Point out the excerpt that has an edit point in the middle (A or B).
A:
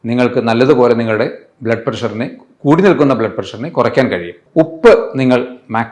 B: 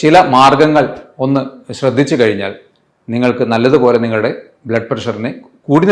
A